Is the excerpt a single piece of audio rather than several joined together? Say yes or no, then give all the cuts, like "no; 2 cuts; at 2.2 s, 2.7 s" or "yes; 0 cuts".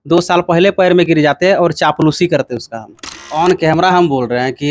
no; 1 cut; at 3.4 s